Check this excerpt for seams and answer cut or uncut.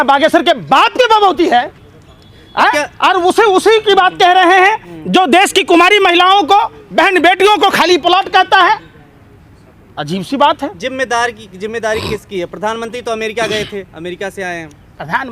uncut